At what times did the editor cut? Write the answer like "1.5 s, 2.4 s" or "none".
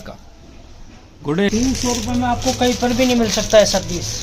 1.5 s